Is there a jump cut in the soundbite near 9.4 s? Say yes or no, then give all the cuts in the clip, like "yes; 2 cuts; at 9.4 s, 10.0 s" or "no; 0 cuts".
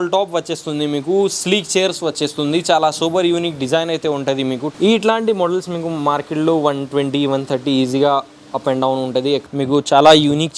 yes; 2 cuts; at 4.7 s, 9.4 s